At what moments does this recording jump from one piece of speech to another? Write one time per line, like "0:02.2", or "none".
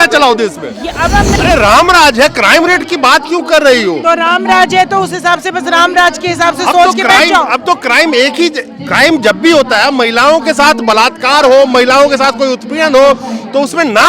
0:01.3